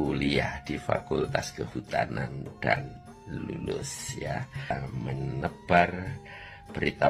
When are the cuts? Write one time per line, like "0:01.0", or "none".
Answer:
0:04.7